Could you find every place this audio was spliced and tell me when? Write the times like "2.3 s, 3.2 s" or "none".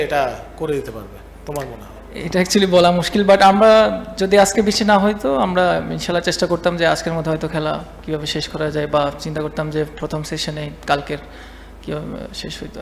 none